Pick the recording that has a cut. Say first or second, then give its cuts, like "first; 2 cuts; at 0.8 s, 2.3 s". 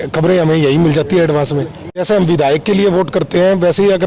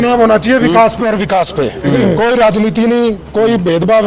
first; 1 cut; at 2.0 s